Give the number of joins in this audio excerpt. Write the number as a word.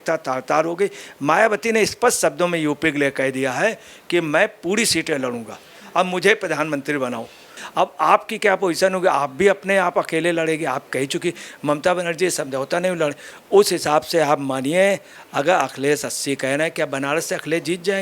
one